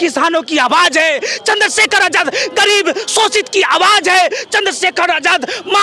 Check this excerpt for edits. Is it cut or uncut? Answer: uncut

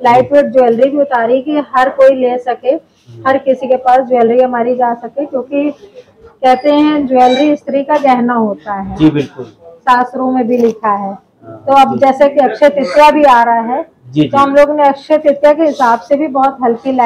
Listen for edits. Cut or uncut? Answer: uncut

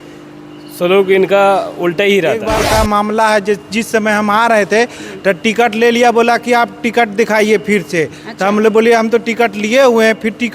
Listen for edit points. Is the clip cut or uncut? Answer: cut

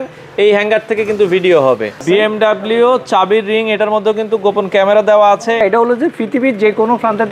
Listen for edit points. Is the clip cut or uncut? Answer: cut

